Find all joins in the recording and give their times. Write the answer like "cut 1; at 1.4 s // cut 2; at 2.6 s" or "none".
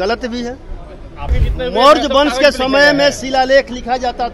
cut 1; at 1.4 s